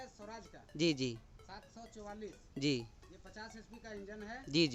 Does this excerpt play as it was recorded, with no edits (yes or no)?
yes